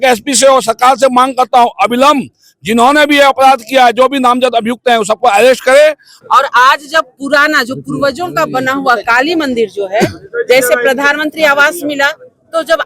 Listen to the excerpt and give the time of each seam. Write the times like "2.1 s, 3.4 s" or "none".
6.1 s